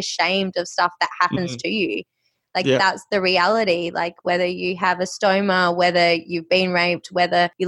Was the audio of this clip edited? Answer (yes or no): no